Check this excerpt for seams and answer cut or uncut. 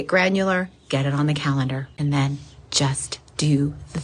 cut